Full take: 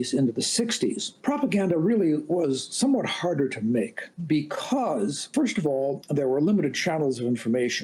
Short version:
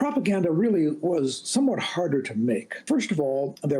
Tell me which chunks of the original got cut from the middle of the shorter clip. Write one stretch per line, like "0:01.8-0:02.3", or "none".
0:04.0-0:05.2